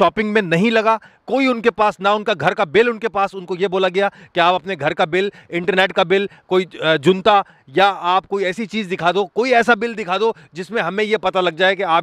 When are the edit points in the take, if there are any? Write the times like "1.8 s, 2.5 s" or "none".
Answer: none